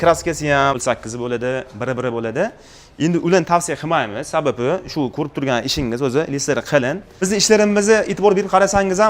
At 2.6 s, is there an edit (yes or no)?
no